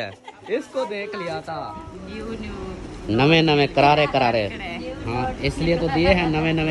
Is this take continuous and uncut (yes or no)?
no